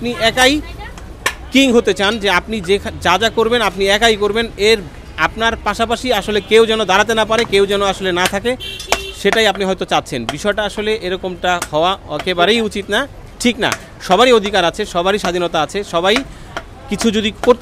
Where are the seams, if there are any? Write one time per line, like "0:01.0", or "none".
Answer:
none